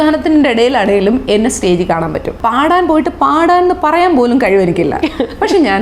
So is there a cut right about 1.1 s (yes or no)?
no